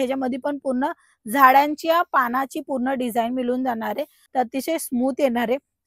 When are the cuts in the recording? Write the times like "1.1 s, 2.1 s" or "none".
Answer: 4.2 s